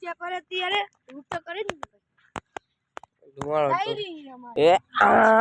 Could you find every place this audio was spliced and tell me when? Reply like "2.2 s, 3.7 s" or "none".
3.4 s, 4.3 s